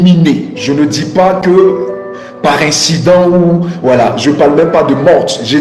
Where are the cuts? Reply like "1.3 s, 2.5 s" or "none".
none